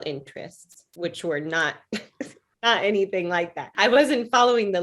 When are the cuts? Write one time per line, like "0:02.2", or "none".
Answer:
0:02.4
0:03.6